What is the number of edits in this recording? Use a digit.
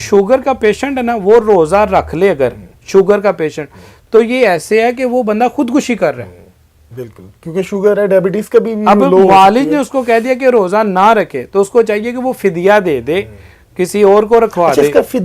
0